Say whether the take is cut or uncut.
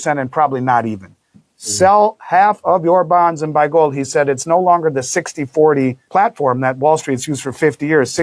cut